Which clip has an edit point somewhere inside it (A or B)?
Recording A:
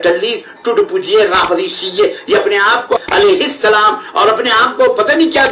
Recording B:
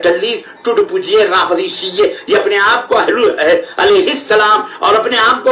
A